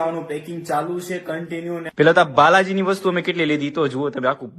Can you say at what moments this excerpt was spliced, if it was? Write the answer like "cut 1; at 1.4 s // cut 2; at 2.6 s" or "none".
cut 1; at 1.9 s